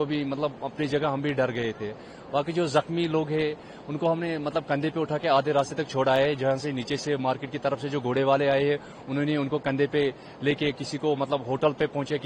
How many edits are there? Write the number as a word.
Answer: zero